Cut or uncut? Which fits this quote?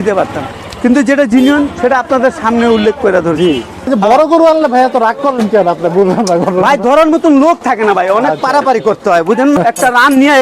cut